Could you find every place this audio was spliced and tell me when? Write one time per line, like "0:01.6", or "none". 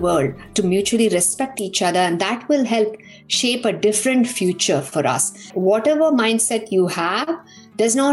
0:05.4